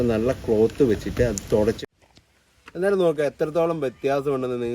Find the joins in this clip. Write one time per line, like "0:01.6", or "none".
0:01.8